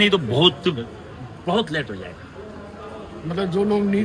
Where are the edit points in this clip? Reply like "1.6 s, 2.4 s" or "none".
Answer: none

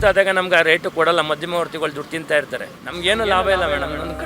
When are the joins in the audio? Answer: 2.8 s

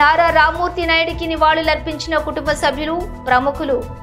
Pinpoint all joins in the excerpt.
none

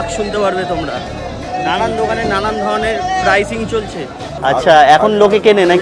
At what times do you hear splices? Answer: 4.2 s

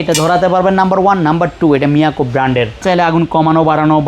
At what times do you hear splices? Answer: 2.8 s

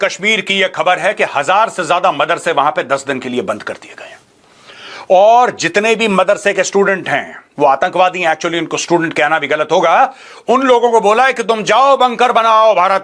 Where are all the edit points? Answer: none

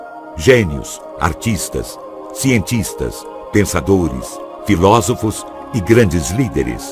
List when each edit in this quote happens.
4.8 s

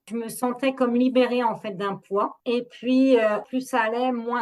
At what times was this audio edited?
3.4 s

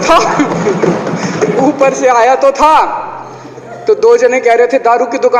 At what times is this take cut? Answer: none

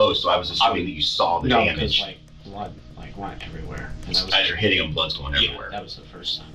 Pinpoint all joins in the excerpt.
none

